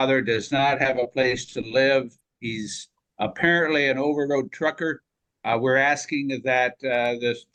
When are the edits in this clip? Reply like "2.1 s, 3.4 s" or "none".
none